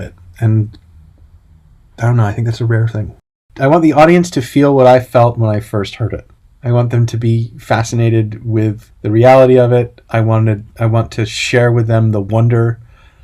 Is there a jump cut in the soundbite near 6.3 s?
no; 2 cuts; at 3.5 s, 8.9 s

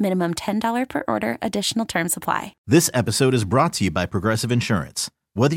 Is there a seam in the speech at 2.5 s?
yes; 1 cut; at 2.5 s

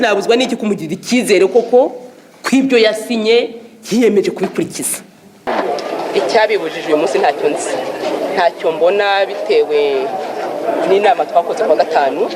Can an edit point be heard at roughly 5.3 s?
yes; 1 cut; at 5.3 s

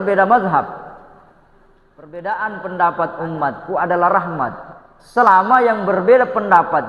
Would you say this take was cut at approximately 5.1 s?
no; 1 cut; at 2.1 s

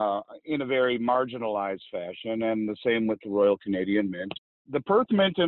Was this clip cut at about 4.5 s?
yes; 1 cut; at 4.5 s

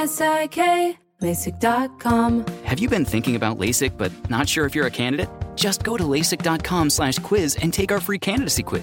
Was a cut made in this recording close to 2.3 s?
no; 0 cuts

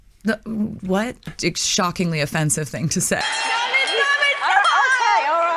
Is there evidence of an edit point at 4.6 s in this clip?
no; 2 cuts; at 1.4 s, 3.2 s

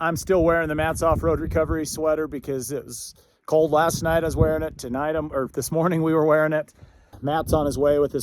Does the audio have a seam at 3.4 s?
no; 1 cut; at 7.2 s

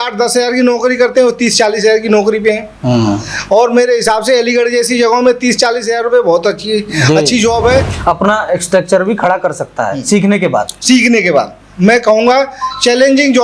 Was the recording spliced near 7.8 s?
yes; 2 cuts; at 7.8 s, 11.6 s

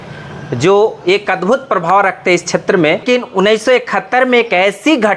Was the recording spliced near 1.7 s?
no; 1 cut; at 3.0 s

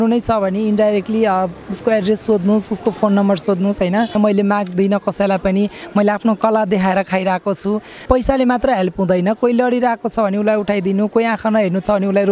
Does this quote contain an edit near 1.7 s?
no; 2 cuts; at 4.1 s, 8.0 s

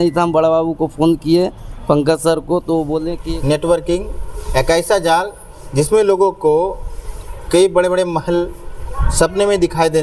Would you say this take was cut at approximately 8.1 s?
no; 1 cut; at 3.2 s

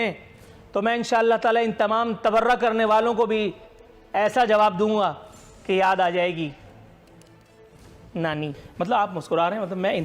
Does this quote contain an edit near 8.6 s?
yes; 1 cut; at 8.6 s

